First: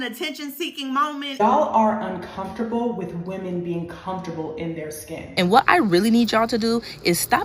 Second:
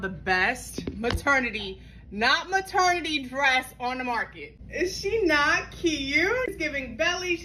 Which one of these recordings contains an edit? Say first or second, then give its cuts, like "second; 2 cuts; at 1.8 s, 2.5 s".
first; 2 cuts; at 1.3 s, 5.3 s